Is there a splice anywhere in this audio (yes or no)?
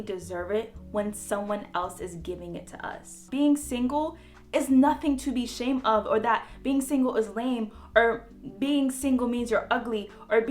yes